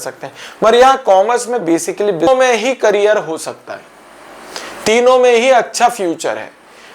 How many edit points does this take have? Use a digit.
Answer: 1